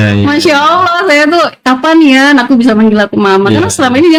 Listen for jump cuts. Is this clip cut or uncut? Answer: uncut